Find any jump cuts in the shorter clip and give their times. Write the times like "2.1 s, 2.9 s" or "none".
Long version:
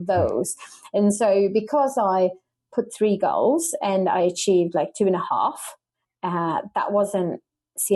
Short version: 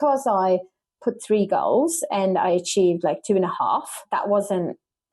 4.0 s